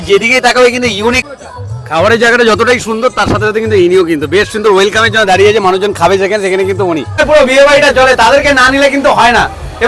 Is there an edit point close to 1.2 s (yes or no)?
yes